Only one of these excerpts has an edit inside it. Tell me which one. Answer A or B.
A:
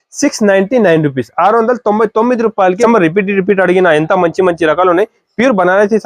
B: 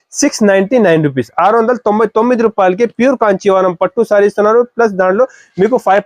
A